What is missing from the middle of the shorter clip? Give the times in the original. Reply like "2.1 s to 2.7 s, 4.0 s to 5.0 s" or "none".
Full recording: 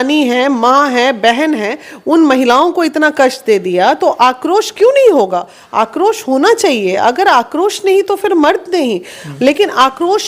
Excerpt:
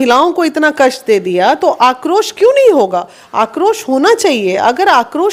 none